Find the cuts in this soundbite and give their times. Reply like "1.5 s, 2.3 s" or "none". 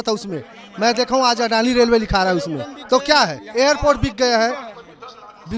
none